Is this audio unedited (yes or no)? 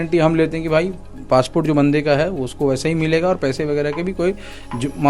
yes